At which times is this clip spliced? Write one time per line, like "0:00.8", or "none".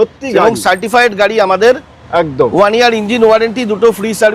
none